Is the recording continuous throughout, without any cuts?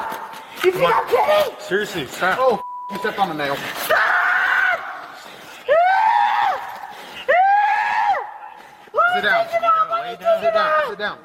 yes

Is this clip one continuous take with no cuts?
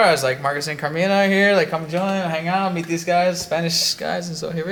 yes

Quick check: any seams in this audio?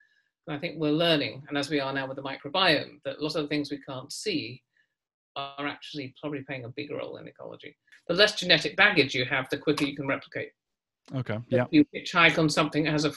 yes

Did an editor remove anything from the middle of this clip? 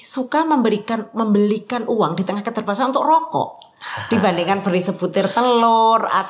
no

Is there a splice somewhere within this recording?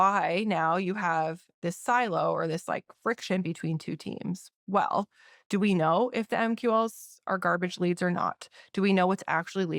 no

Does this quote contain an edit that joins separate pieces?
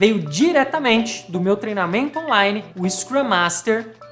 no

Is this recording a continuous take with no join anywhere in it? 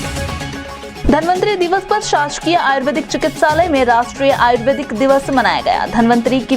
no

